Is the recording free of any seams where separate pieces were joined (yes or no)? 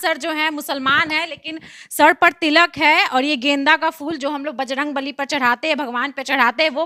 yes